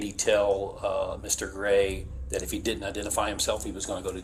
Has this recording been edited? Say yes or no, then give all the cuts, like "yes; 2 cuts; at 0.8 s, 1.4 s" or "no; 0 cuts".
yes; 1 cut; at 2.1 s